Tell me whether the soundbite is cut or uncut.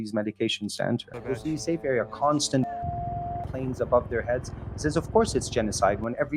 cut